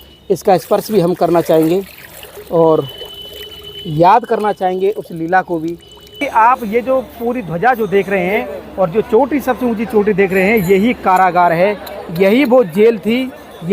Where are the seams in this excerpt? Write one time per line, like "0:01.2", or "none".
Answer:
0:06.2

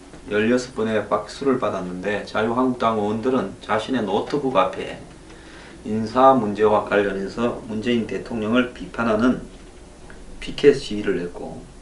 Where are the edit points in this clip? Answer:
0:03.6

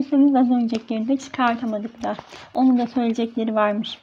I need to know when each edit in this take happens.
none

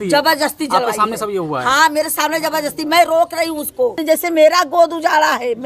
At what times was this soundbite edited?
0:04.0

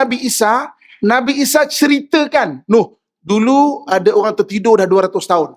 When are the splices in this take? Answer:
none

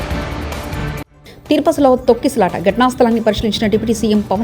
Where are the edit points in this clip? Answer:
0:01.2

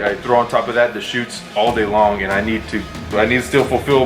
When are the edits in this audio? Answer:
0:03.1

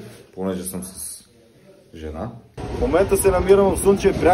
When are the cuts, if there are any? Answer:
0:02.6

